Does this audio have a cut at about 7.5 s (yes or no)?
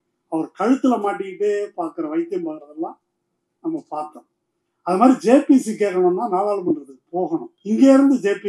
yes